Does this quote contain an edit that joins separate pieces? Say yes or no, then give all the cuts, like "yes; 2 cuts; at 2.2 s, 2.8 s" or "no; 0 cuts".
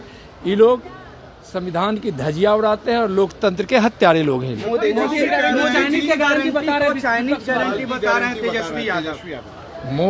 no; 0 cuts